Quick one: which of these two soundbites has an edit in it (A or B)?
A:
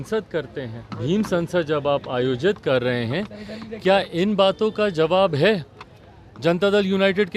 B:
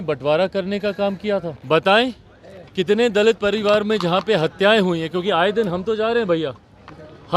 B